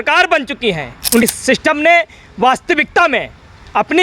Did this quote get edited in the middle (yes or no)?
yes